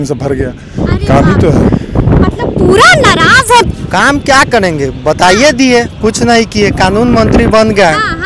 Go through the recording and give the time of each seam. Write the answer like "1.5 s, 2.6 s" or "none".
3.7 s